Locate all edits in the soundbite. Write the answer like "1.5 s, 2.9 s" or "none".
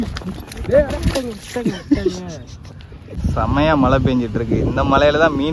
3.1 s